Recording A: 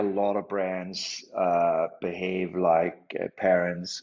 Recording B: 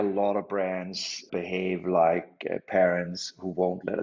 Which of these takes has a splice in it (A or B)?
B